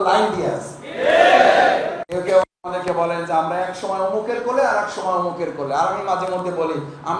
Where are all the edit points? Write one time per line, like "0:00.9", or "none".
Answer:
0:02.0